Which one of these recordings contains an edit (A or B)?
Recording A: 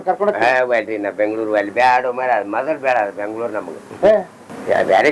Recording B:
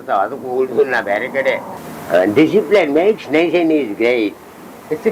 B